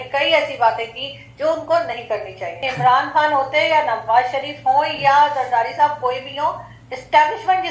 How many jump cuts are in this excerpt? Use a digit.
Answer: 1